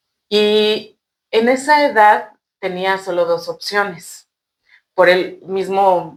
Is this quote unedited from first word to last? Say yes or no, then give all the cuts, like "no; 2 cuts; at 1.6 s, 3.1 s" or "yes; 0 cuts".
yes; 0 cuts